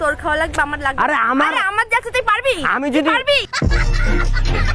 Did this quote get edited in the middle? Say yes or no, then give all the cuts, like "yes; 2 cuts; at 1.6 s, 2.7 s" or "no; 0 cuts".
no; 0 cuts